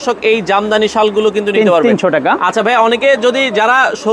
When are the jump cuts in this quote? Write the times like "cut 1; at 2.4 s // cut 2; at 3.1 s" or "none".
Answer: none